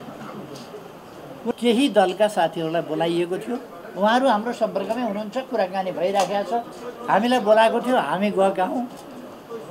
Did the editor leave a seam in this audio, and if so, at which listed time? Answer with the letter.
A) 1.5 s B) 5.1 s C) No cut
A